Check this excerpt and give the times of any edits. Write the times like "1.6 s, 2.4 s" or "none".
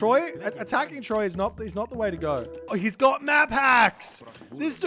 2.6 s